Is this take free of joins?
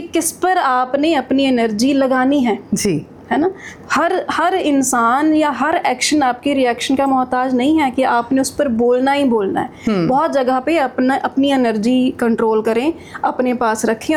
yes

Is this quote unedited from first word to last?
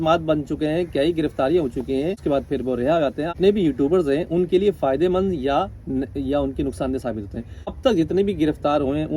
no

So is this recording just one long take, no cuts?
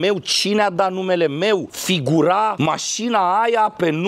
yes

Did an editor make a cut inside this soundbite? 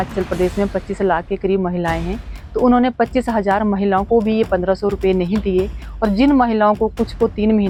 no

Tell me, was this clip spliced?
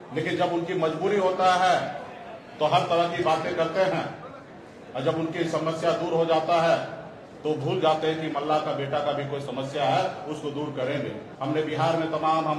yes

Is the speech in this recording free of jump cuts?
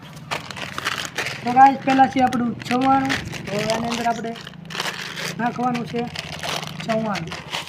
yes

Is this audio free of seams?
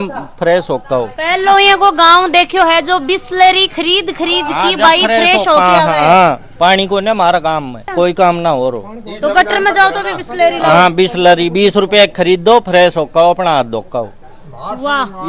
yes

